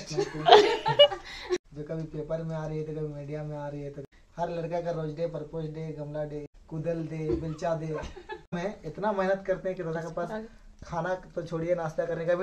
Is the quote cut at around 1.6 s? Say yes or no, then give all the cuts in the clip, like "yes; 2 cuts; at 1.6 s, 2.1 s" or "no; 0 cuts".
yes; 4 cuts; at 1.6 s, 4.0 s, 6.5 s, 8.6 s